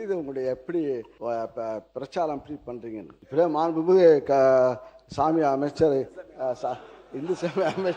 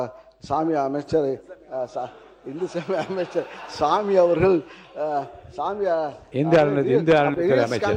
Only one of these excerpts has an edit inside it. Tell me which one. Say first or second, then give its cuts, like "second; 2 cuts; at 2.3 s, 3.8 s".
first; 2 cuts; at 1.1 s, 3.2 s